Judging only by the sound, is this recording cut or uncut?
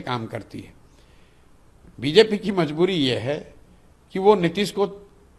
uncut